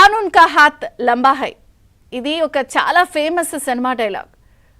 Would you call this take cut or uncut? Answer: cut